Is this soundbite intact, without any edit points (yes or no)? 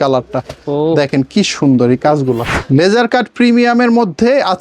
no